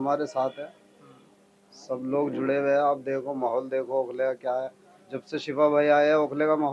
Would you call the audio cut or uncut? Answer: uncut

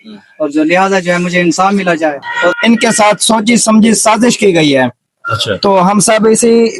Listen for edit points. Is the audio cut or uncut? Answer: cut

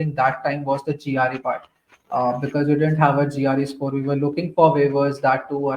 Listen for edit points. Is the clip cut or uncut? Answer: uncut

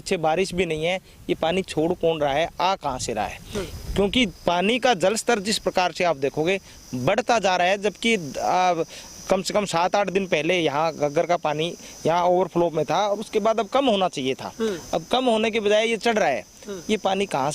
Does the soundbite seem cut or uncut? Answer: uncut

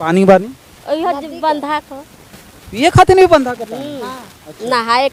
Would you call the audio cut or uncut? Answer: uncut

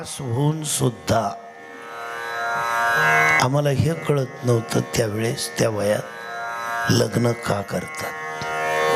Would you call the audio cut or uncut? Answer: uncut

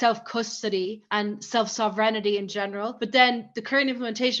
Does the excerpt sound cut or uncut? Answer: cut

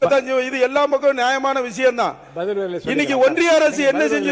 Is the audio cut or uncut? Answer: uncut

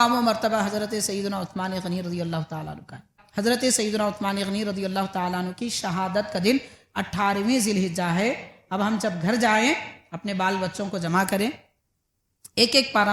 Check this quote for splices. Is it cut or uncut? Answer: cut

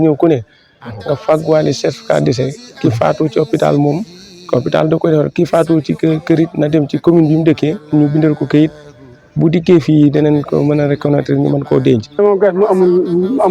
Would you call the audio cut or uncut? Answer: cut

